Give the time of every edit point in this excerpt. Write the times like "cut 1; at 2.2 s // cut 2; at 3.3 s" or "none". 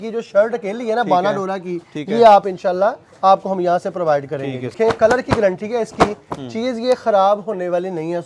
cut 1; at 4.7 s